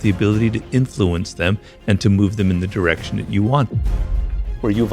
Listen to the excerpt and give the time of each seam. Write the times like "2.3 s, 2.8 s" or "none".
3.9 s